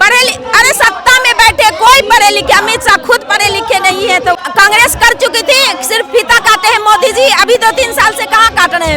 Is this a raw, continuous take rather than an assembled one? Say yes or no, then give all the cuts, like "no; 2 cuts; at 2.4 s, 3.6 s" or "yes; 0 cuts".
no; 1 cut; at 4.4 s